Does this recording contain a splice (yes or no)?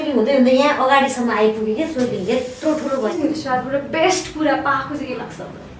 yes